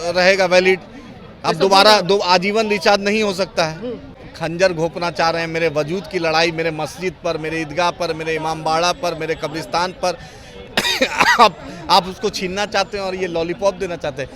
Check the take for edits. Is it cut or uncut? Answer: cut